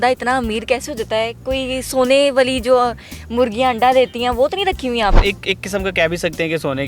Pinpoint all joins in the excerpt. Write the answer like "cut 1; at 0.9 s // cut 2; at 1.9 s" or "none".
cut 1; at 5.2 s